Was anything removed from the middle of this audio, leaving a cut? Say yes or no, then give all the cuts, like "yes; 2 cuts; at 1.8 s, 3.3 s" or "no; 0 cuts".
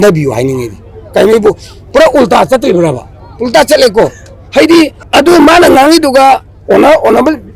yes; 1 cut; at 5.0 s